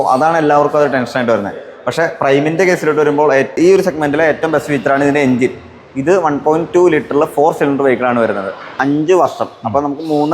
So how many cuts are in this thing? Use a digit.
2